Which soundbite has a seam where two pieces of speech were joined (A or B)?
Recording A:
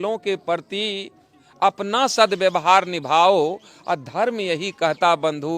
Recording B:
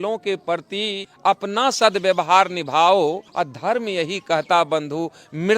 B